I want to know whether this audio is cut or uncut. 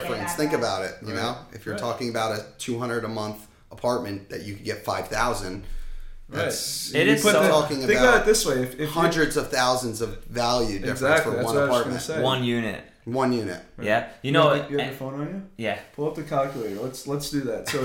uncut